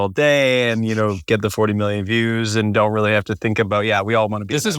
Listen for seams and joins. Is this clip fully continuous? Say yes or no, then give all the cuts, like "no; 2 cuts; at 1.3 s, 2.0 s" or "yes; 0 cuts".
yes; 0 cuts